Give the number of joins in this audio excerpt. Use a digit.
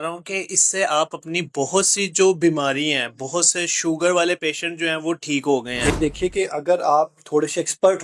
1